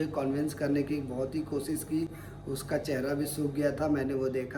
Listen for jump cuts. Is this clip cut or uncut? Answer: uncut